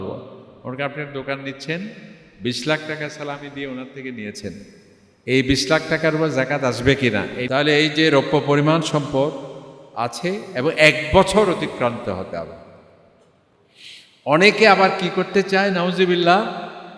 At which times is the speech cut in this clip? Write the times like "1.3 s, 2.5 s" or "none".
7.4 s